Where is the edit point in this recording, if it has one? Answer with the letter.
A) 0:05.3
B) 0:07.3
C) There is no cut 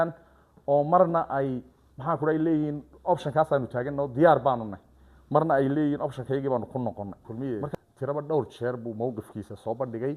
B